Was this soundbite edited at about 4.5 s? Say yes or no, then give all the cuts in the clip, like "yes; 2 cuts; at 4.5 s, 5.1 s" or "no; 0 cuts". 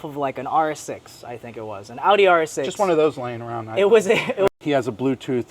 yes; 1 cut; at 4.5 s